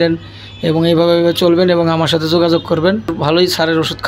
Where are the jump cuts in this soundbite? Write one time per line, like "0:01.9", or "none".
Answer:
0:03.2